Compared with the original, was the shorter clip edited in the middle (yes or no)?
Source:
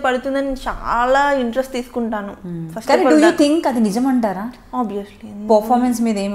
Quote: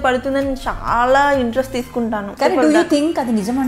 yes